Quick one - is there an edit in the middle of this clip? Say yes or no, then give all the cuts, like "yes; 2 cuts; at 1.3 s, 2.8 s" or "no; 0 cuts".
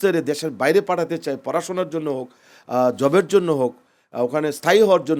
no; 0 cuts